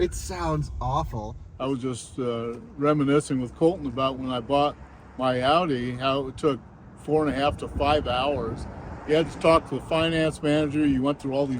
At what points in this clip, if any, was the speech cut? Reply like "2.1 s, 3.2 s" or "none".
1.4 s